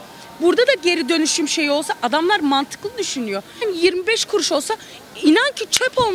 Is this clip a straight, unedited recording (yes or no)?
no